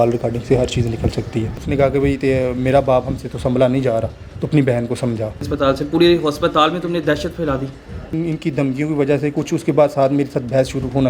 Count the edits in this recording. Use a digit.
3